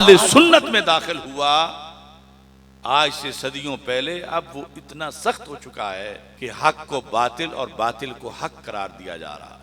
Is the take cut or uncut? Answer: cut